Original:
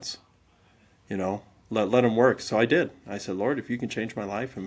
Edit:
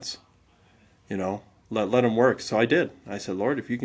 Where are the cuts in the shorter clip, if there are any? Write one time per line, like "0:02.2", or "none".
none